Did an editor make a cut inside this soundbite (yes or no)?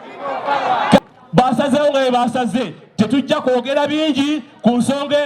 yes